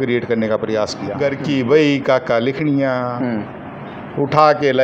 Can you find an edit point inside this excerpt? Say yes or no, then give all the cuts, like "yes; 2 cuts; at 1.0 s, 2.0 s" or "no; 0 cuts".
yes; 1 cut; at 1.3 s